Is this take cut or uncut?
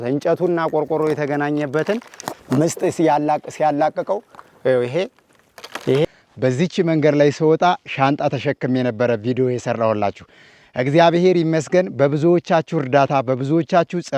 cut